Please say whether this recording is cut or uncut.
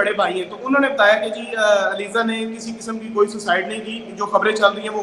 uncut